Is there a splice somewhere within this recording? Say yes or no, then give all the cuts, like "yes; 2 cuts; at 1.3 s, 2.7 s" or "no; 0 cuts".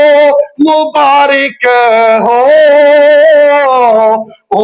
no; 0 cuts